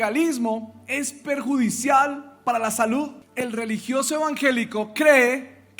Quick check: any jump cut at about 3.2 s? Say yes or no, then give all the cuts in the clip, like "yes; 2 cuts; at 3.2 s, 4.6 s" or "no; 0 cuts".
yes; 1 cut; at 3.2 s